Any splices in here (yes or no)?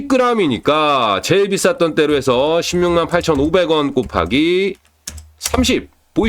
no